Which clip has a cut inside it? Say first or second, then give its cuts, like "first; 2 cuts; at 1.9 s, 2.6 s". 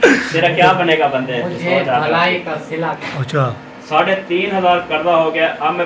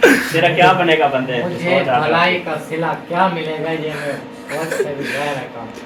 first; 1 cut; at 3.0 s